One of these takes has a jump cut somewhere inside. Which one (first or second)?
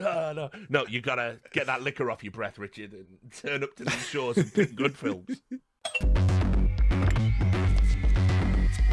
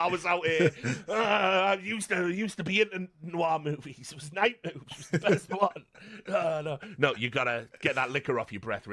first